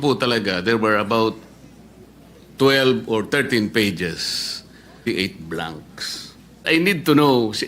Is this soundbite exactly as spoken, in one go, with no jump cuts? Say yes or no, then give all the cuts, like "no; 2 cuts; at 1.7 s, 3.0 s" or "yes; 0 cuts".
no; 2 cuts; at 5.0 s, 6.6 s